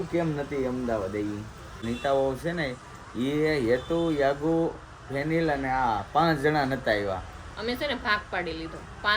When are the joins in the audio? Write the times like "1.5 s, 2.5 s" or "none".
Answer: 1.8 s

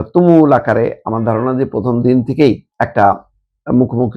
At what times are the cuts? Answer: 2.7 s

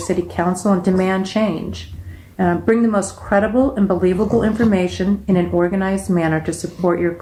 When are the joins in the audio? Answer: none

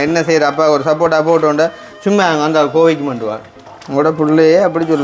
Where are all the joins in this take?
3.7 s

